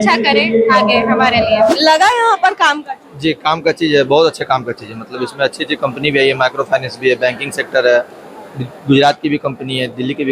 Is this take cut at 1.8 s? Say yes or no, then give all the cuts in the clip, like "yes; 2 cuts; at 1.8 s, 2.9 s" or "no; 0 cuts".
yes; 1 cut; at 1.8 s